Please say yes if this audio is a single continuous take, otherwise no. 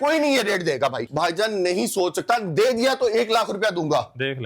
no